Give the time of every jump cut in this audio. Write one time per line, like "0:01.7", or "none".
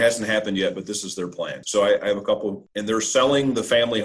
0:01.6
0:02.6